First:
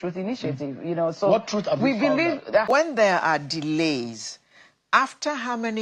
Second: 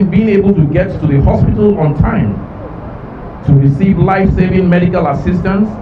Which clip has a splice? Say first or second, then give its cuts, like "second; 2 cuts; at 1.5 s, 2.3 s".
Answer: first; 1 cut; at 2.7 s